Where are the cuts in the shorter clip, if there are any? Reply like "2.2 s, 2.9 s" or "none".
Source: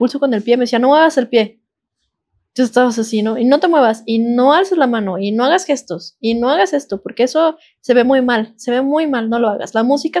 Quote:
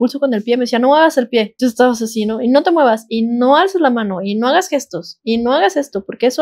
1.5 s